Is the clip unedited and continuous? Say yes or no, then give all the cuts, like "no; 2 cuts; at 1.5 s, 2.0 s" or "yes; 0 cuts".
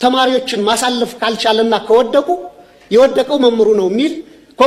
yes; 0 cuts